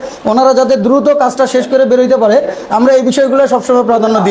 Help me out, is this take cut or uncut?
uncut